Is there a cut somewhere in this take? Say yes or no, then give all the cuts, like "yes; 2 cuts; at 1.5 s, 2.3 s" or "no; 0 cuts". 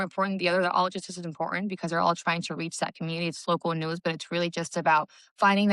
no; 0 cuts